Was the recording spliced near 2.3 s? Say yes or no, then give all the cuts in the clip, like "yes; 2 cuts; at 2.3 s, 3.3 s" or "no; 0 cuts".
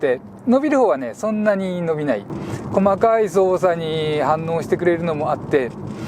yes; 1 cut; at 2.3 s